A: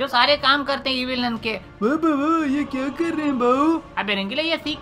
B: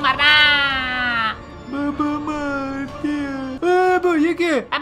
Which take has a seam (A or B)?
B